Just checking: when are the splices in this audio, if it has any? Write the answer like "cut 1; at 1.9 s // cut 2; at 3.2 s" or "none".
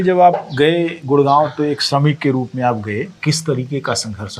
cut 1; at 3.1 s